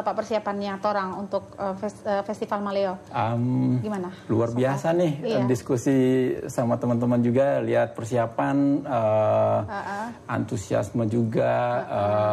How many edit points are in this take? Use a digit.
0